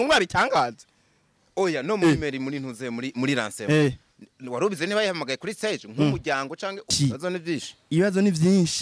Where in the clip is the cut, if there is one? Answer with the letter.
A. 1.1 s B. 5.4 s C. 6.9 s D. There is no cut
C